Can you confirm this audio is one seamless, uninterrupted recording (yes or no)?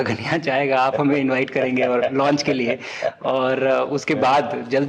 yes